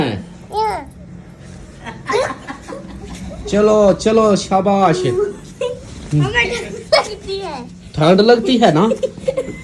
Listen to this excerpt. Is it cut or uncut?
uncut